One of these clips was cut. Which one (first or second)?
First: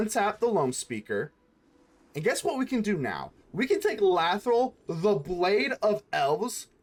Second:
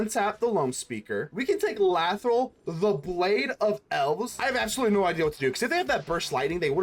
second